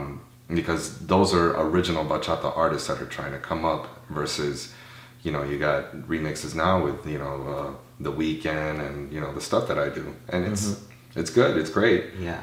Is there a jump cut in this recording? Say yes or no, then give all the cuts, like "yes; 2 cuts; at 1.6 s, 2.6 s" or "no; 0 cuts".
no; 0 cuts